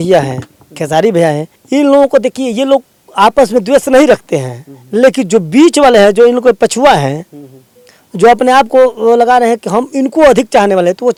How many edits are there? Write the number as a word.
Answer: zero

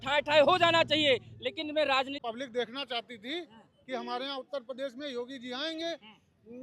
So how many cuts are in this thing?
one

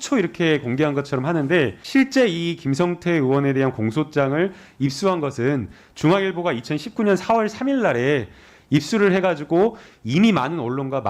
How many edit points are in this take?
one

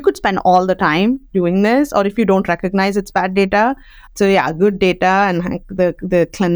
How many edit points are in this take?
one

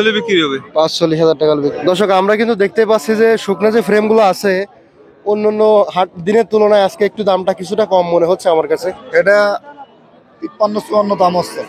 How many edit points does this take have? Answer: two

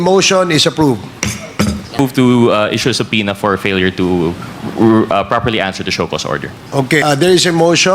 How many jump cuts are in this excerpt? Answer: two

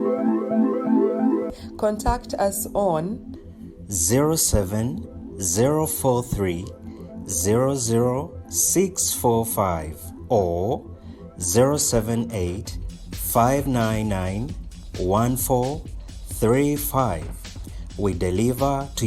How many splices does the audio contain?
one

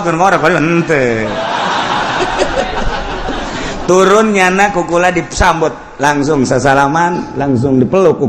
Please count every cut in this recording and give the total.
one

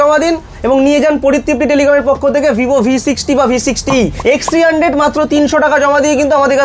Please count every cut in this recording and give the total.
one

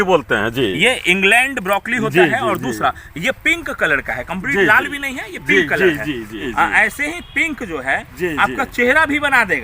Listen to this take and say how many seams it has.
one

